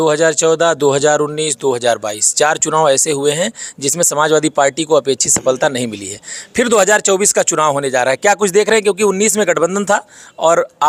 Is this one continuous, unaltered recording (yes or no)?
yes